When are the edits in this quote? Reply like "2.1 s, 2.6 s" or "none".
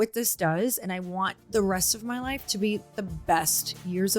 1.4 s, 3.0 s